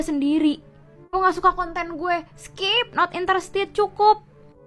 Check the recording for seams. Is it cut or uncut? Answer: uncut